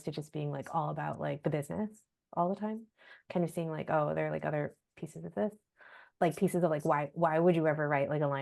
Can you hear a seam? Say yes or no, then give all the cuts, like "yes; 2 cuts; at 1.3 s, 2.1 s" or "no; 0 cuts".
no; 0 cuts